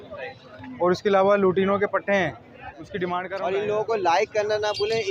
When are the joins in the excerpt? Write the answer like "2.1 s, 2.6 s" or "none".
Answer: 3.2 s